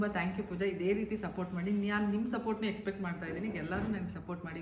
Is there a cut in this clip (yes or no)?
no